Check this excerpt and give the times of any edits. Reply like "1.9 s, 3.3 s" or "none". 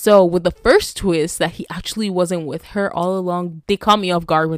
3.6 s